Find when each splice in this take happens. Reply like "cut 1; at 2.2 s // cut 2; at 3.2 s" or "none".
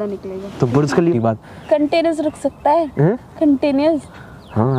cut 1; at 1.1 s